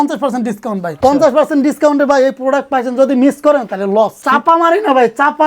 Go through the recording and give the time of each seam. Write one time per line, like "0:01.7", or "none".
0:00.9
0:04.2